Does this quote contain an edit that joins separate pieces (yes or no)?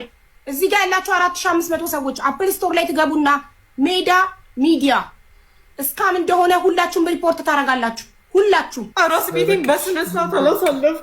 yes